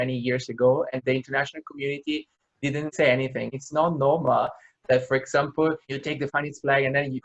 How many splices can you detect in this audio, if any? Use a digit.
2